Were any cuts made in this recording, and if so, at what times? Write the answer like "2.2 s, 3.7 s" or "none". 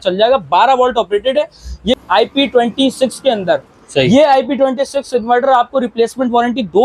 2.0 s